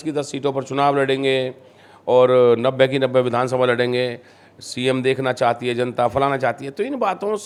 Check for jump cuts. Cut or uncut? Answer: uncut